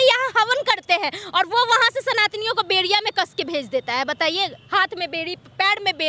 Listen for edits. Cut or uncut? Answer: uncut